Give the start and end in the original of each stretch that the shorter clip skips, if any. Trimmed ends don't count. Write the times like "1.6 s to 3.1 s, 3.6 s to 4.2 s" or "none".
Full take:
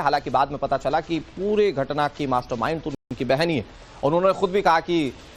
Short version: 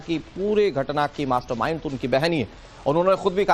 2.9 s to 3.1 s